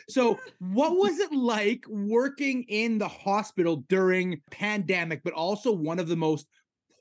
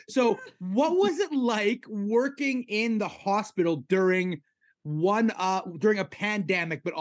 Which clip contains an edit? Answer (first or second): first